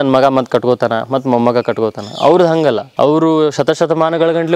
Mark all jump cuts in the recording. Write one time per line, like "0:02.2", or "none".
0:02.9